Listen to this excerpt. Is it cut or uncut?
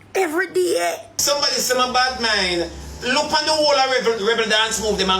cut